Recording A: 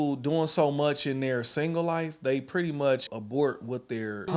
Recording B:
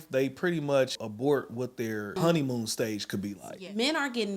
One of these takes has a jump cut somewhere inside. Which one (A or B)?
B